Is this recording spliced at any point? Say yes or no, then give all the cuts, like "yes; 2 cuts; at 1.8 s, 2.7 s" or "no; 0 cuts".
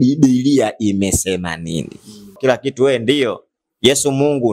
yes; 1 cut; at 2.3 s